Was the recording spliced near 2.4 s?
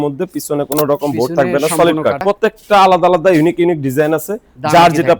yes; 1 cut; at 2.4 s

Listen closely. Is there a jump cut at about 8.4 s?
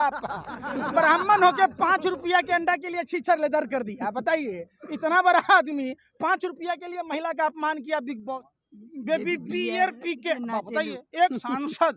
yes; 1 cut; at 8.4 s

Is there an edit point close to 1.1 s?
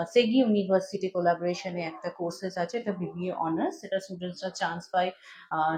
no; 0 cuts

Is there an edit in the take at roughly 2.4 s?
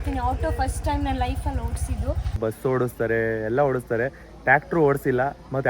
yes; 1 cut; at 2.4 s

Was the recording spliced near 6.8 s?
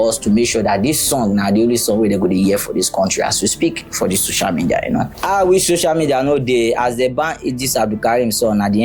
no; 1 cut; at 5.2 s

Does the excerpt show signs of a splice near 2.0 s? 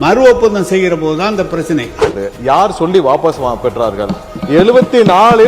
yes; 1 cut; at 2.0 s

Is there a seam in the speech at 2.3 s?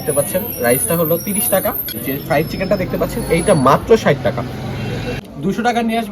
yes; 2 cuts; at 2.3 s, 5.1 s

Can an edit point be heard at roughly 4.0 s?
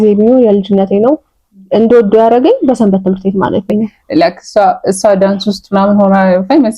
yes; 1 cut; at 4.0 s

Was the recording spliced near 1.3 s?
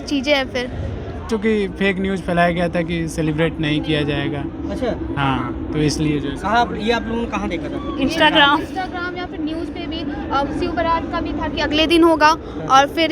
yes; 1 cut; at 1.3 s

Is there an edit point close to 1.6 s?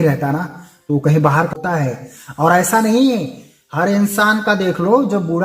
yes; 1 cut; at 1.6 s

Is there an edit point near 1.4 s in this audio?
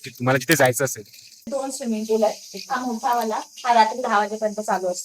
yes; 1 cut; at 1.4 s

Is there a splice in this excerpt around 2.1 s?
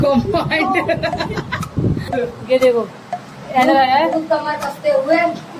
yes; 1 cut; at 2.1 s

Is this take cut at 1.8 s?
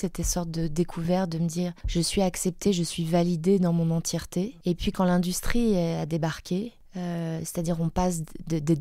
yes; 3 cuts; at 1.8 s, 4.6 s, 6.8 s

